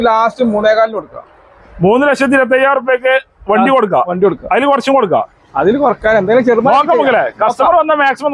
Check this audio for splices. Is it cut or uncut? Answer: uncut